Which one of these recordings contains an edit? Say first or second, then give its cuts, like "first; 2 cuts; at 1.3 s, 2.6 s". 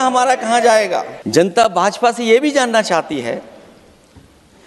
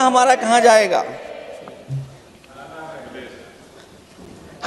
first; 1 cut; at 1.2 s